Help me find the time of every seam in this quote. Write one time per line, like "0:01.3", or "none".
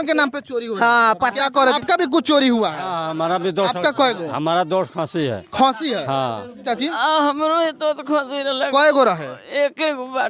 0:01.8
0:06.6